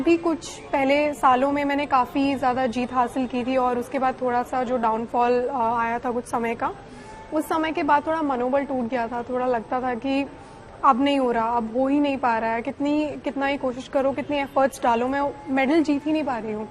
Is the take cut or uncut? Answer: uncut